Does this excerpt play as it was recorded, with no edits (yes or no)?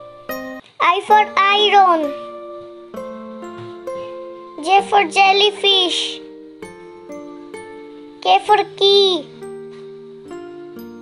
no